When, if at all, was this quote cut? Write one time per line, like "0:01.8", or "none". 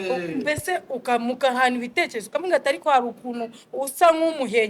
none